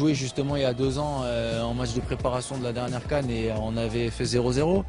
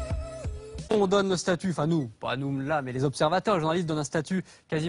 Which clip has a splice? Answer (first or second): second